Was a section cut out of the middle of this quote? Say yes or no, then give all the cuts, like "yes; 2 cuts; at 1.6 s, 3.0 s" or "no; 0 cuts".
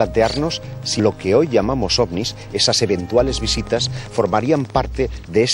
yes; 1 cut; at 1.0 s